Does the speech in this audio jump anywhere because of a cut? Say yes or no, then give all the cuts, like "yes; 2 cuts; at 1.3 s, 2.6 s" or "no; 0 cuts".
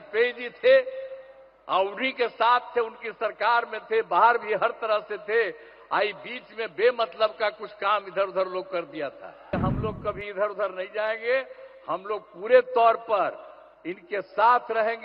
yes; 1 cut; at 9.5 s